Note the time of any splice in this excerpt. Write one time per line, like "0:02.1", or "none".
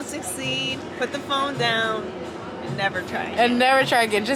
none

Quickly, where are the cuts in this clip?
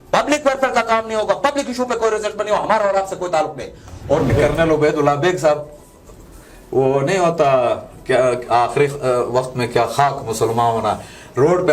0:04.3

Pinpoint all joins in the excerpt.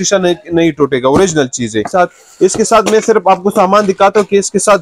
0:01.9

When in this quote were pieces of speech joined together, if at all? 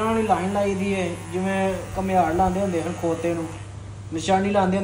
none

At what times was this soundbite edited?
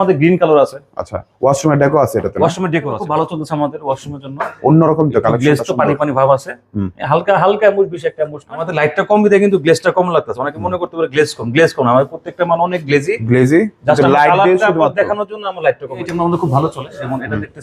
0:03.0
0:08.7
0:16.1

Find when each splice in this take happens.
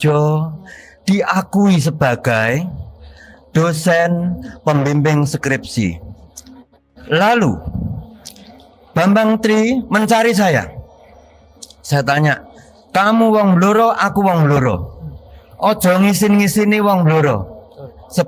none

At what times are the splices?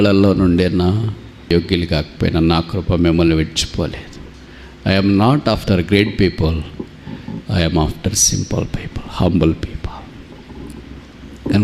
0:01.5

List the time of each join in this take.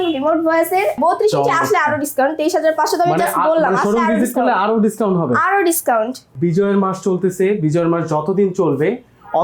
0:01.0
0:06.2

